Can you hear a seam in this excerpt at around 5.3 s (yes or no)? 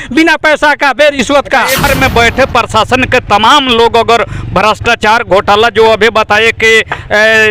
no